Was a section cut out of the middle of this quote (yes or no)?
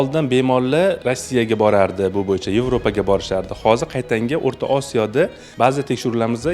yes